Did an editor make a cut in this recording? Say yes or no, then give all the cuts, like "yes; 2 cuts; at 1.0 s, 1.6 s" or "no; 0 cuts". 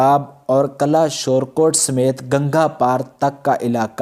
no; 0 cuts